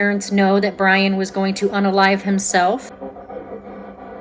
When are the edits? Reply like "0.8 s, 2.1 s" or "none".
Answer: 2.9 s